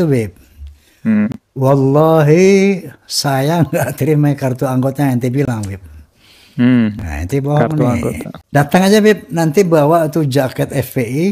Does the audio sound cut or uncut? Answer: cut